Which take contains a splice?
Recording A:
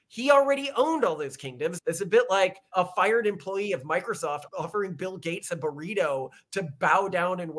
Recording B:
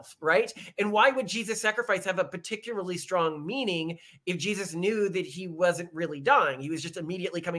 A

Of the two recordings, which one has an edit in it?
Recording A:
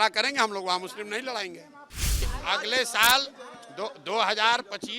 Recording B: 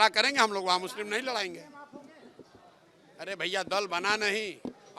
A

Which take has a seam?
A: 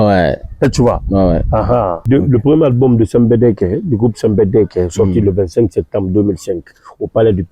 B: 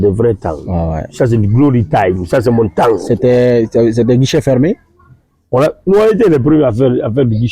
A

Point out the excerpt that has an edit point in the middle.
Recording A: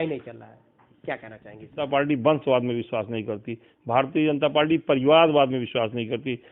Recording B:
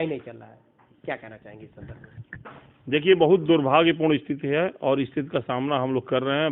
A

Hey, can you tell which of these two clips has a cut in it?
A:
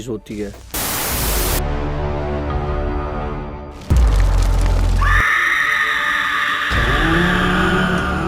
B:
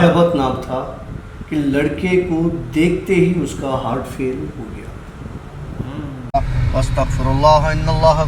B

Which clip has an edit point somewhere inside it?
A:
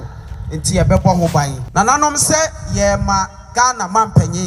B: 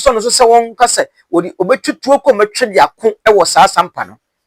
A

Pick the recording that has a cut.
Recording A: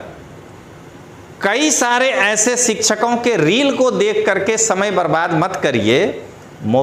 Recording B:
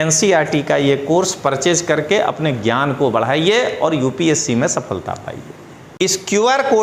B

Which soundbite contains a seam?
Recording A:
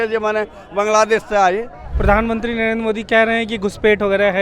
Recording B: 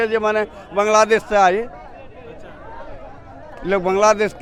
A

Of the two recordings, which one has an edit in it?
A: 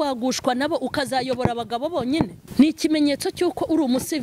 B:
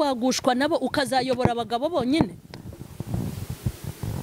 A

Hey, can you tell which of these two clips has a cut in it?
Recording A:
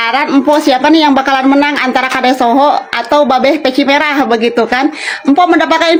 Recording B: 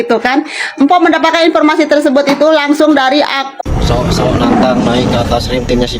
B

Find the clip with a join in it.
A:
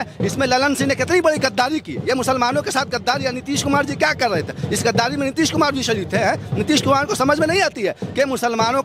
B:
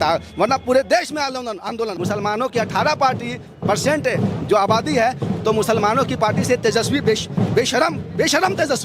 B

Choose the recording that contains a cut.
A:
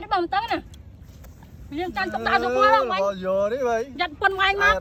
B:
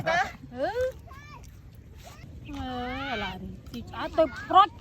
B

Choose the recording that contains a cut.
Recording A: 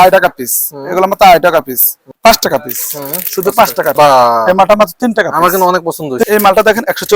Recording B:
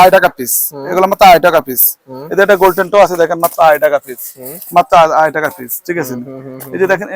A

